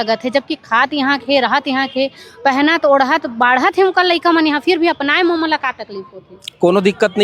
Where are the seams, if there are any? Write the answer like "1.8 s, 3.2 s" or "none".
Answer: none